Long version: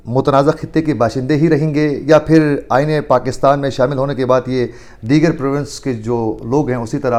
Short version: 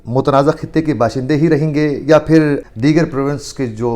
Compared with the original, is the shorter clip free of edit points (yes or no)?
no